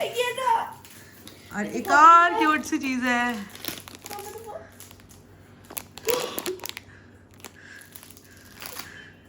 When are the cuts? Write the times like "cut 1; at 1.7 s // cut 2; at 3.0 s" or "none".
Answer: none